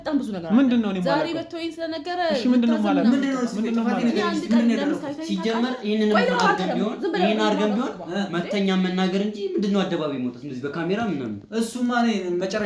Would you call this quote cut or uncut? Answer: uncut